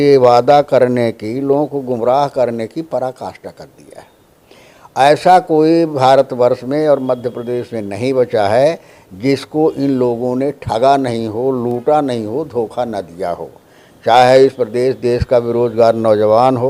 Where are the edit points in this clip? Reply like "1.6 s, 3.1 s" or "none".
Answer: none